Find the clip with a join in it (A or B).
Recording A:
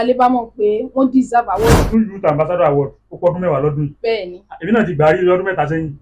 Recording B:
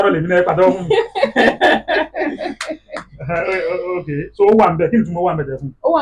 A